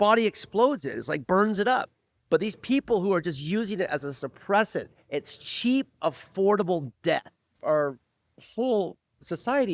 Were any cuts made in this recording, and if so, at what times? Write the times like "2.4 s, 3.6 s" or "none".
7.6 s